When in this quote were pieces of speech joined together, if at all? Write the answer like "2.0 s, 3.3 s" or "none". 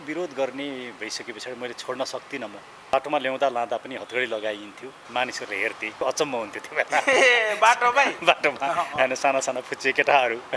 2.9 s, 4.9 s, 6.0 s